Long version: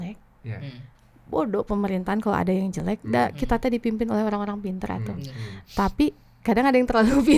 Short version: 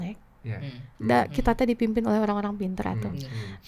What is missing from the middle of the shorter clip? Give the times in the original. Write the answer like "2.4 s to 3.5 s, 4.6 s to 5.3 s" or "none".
1.0 s to 3.0 s